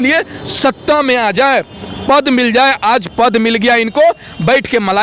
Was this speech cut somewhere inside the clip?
no; 0 cuts

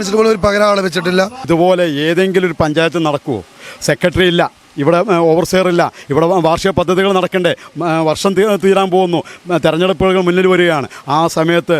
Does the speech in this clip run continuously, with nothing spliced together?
no; 1 cut; at 1.4 s

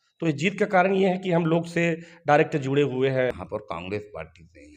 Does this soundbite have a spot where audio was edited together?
yes; 1 cut; at 3.4 s

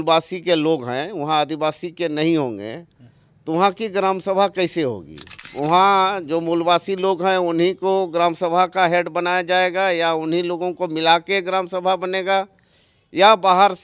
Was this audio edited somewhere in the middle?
yes; 1 cut; at 5.5 s

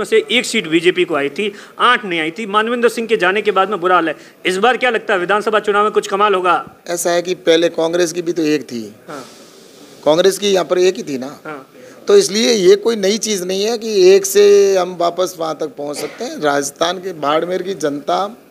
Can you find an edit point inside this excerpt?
no; 0 cuts

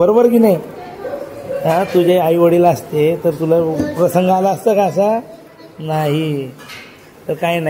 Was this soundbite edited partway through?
no; 0 cuts

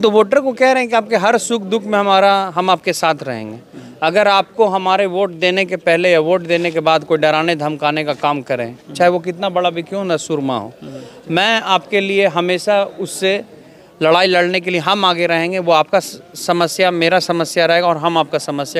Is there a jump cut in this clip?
no; 0 cuts

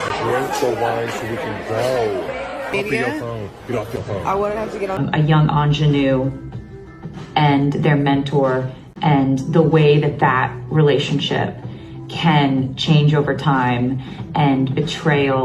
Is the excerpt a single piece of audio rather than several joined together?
no; 2 cuts; at 2.7 s, 5.0 s

